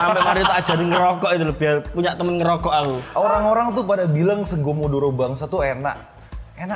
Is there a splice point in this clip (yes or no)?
yes